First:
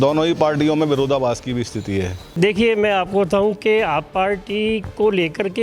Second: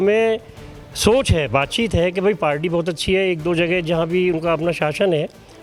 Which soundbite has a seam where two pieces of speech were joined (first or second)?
first